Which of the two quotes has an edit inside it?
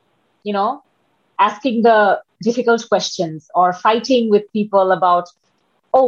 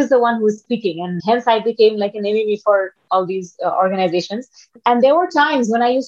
second; 2 cuts; at 1.2 s, 4.8 s

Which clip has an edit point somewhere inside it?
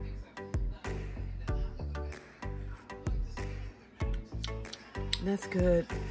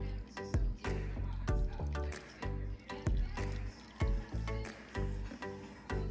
first; 1 cut; at 5.2 s

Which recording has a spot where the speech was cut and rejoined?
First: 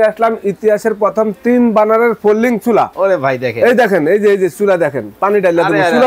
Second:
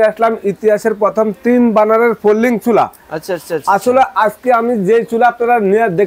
first; 1 cut; at 2.9 s

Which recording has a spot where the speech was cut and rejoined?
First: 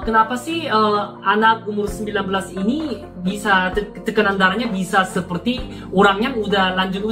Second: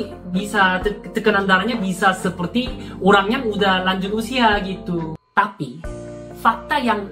second; 1 cut; at 5.2 s

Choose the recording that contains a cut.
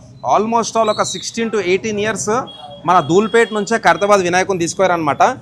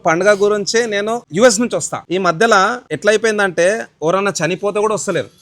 second; 3 cuts; at 1.2 s, 2.0 s, 2.9 s

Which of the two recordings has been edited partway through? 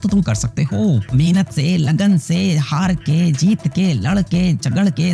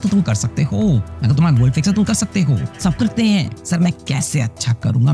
first; 1 cut; at 1.1 s

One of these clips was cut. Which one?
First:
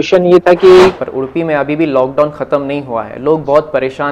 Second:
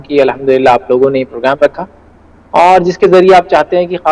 first; 1 cut; at 1.0 s

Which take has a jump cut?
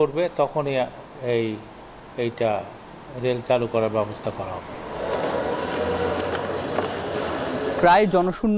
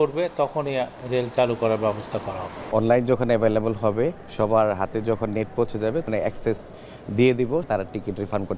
second; 5 cuts; at 1.0 s, 2.7 s, 4.2 s, 6.1 s, 7.7 s

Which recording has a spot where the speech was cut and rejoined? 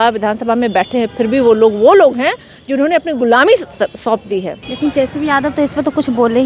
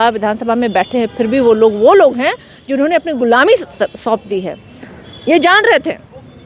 first; 1 cut; at 4.6 s

